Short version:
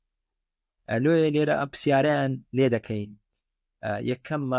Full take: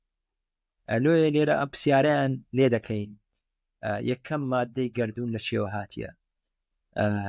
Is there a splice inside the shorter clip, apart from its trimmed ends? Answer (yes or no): no